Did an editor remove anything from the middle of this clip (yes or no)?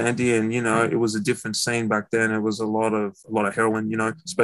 no